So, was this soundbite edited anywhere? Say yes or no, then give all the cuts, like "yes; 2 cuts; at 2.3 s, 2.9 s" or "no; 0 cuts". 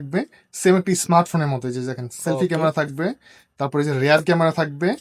no; 0 cuts